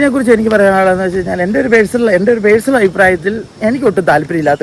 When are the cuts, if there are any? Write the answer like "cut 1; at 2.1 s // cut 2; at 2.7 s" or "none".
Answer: none